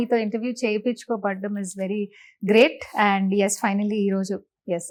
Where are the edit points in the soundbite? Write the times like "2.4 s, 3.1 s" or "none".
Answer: none